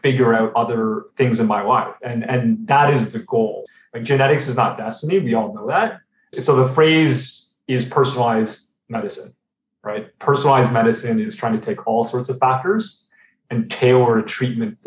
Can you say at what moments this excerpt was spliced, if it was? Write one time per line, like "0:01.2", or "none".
0:03.7
0:06.3